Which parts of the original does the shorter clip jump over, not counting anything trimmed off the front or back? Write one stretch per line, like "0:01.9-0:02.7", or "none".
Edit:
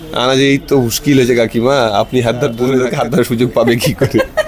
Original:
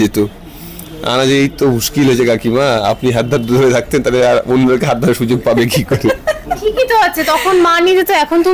0:03.6-0:04.6